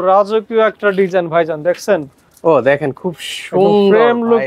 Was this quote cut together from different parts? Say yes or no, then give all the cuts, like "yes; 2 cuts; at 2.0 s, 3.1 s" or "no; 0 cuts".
no; 0 cuts